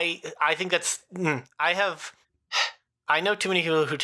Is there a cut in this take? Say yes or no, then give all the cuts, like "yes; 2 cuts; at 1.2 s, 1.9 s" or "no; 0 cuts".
no; 0 cuts